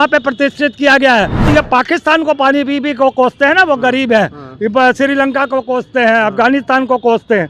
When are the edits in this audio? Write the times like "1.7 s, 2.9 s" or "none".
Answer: 1.5 s